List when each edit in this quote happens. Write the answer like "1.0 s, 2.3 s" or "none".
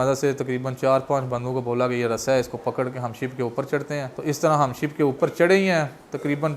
4.1 s